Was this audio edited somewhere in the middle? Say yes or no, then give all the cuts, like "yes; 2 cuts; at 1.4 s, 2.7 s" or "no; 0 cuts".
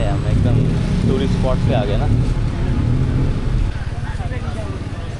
no; 0 cuts